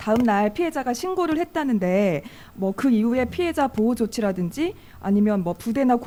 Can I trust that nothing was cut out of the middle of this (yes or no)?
yes